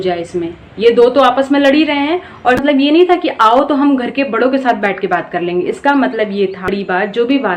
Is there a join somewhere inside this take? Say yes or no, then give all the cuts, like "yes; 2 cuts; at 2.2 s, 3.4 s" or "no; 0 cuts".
yes; 2 cuts; at 2.6 s, 6.7 s